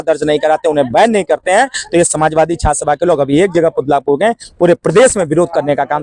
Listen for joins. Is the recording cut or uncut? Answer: uncut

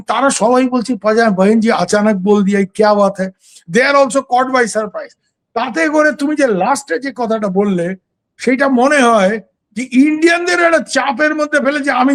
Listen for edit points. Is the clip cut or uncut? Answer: uncut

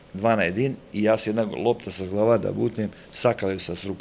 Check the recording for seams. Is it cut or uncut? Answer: uncut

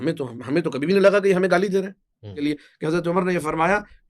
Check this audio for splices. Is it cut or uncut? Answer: cut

